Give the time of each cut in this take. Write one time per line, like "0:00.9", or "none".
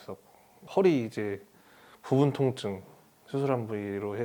none